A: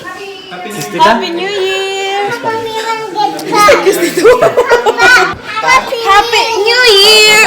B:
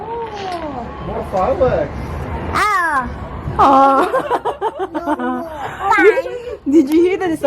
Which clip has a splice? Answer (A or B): A